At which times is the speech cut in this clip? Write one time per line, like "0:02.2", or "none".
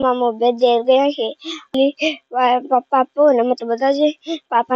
0:01.7